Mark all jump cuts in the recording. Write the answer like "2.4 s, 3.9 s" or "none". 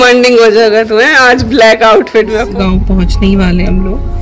2.4 s